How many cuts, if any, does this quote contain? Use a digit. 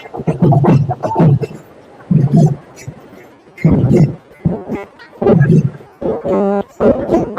1